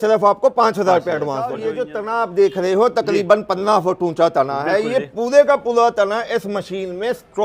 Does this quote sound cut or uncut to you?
cut